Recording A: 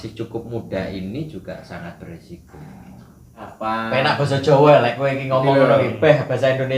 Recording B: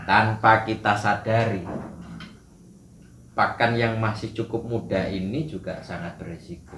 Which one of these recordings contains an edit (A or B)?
A